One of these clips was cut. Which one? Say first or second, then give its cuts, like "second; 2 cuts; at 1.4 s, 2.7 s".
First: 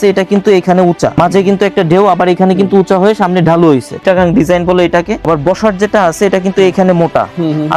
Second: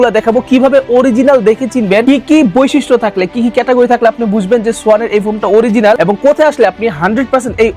first; 3 cuts; at 1.1 s, 3.9 s, 5.2 s